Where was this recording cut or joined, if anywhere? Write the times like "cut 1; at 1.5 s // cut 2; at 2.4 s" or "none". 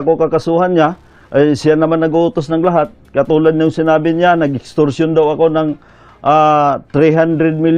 none

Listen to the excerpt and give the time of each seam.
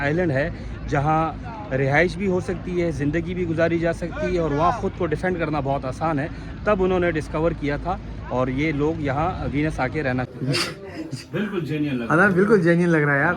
cut 1; at 10.3 s

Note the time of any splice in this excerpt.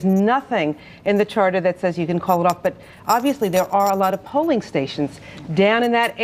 none

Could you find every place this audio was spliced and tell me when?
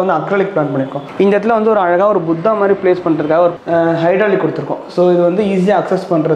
cut 1; at 1.1 s // cut 2; at 3.6 s

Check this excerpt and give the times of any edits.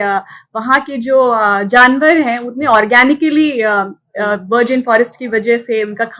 none

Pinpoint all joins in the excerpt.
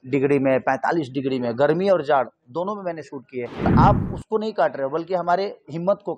cut 1; at 3.7 s

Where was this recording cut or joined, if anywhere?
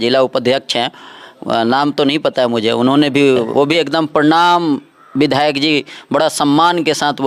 none

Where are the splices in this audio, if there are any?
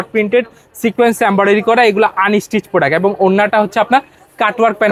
none

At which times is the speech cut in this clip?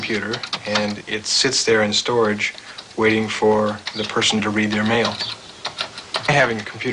cut 1; at 2.6 s

